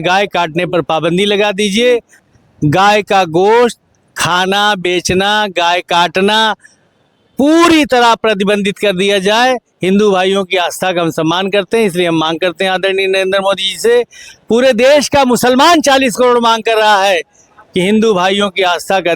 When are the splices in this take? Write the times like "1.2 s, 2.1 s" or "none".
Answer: 2.2 s

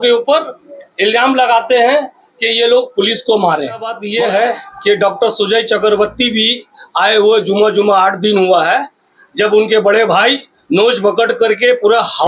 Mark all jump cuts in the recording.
4.0 s

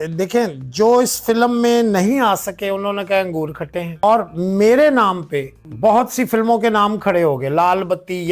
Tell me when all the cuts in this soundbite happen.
4.0 s, 5.6 s

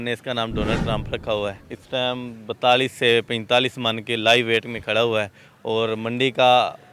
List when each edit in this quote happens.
1.7 s

